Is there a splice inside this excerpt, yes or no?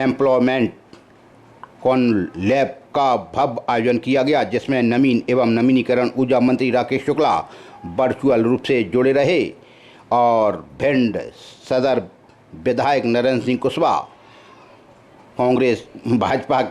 no